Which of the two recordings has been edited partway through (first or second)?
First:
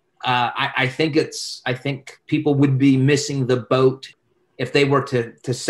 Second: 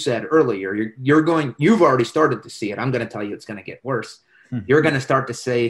first